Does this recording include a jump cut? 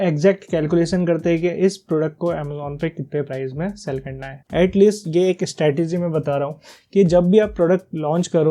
yes; 1 cut; at 4.3 s

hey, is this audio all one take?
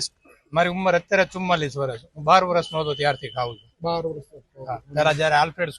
yes; 0 cuts

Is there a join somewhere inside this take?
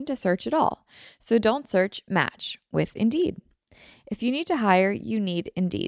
no; 0 cuts

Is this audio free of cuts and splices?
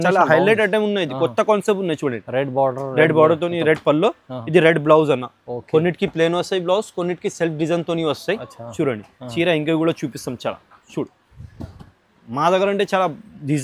yes; 0 cuts

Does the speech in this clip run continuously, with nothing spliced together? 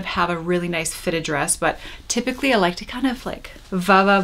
yes; 0 cuts

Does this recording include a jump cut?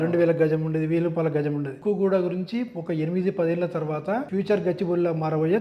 yes; 2 cuts; at 1.7 s, 4.3 s

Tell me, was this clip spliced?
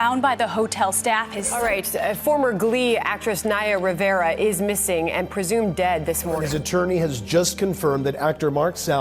yes; 2 cuts; at 1.4 s, 6.4 s

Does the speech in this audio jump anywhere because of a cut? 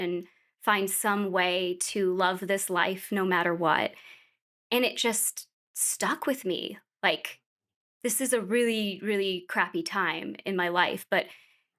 no; 0 cuts

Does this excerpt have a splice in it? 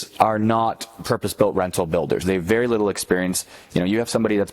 yes; 1 cut; at 2.2 s

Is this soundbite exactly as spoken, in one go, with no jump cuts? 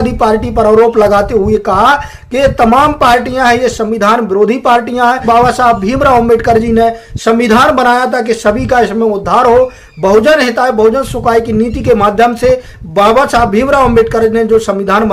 no; 1 cut; at 5.2 s

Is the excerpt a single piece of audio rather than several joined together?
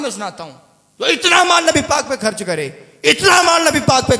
yes; 0 cuts

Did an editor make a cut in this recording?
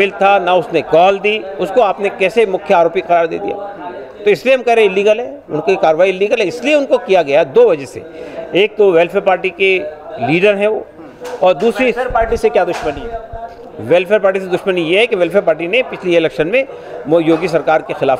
no; 0 cuts

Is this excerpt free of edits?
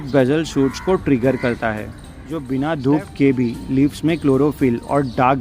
no; 1 cut; at 2.4 s

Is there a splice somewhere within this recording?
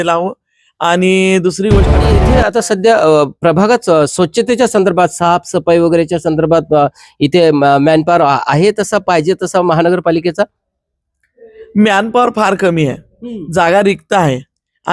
yes; 1 cut; at 2.0 s

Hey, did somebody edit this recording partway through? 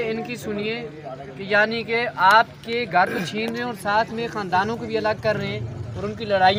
no; 0 cuts

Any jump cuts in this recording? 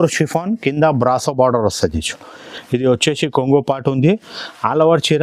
no; 0 cuts

